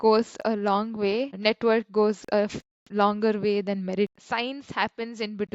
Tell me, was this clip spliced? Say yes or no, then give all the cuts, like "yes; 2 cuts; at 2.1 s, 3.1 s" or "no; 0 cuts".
yes; 1 cut; at 4.1 s